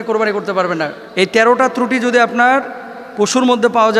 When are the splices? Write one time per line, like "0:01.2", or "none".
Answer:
0:01.0